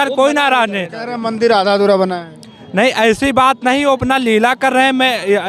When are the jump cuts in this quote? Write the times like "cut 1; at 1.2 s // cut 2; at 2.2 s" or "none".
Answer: none